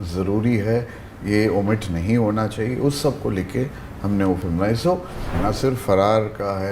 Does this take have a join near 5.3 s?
yes; 1 cut; at 5.3 s

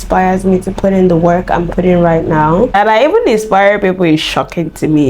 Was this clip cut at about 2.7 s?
yes; 1 cut; at 2.7 s

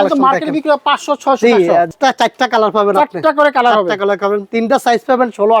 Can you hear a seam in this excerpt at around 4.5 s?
yes; 2 cuts; at 1.9 s, 4.5 s

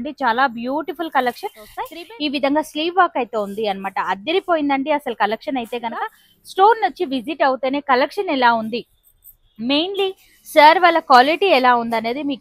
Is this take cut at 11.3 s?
no; 2 cuts; at 2.0 s, 6.2 s

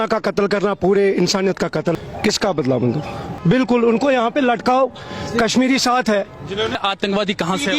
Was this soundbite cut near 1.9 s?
yes; 3 cuts; at 1.9 s, 3.3 s, 6.8 s

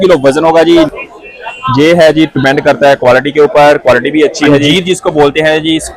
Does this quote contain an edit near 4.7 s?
yes; 2 cuts; at 0.9 s, 4.7 s

